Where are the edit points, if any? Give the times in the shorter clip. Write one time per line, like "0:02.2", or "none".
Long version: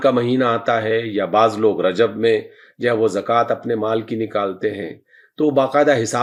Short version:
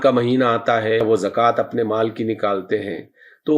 0:01.0

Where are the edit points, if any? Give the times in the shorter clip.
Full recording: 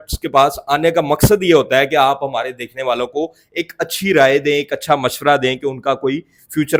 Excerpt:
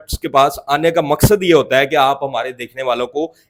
none

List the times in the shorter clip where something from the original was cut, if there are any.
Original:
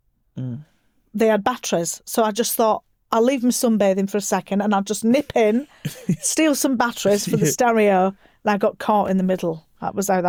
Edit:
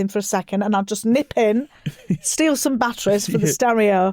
none

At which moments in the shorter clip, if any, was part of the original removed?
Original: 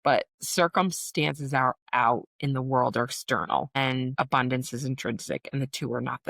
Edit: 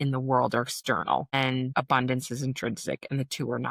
none

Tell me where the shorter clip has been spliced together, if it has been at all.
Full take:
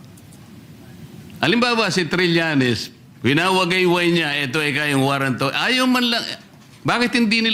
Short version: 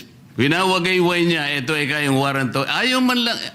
none

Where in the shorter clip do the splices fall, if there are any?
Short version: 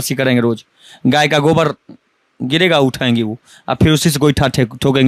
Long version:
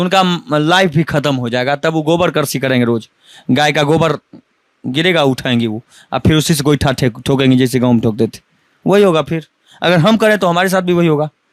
none

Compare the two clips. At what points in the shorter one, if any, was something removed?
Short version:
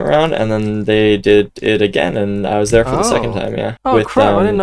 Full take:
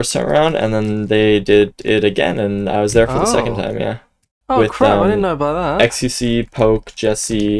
0:03.7

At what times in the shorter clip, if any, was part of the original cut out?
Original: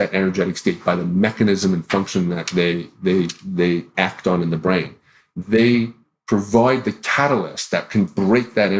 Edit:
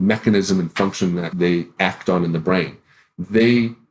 0:01.3

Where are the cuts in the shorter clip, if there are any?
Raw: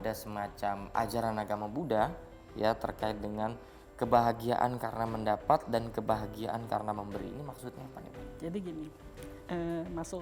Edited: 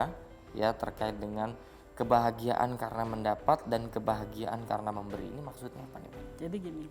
none

